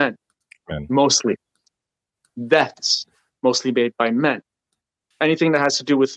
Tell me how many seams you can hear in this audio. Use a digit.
1